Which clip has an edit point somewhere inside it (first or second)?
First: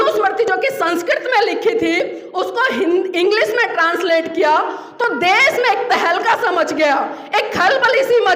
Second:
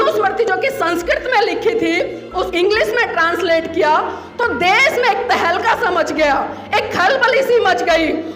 second